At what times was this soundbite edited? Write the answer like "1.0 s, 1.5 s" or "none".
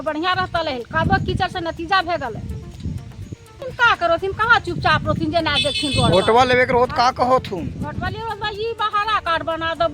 3.7 s